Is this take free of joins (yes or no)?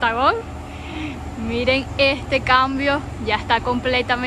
yes